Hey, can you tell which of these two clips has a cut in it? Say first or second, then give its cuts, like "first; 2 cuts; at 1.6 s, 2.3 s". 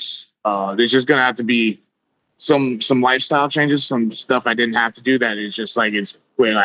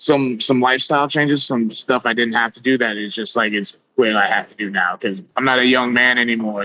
second; 1 cut; at 5.2 s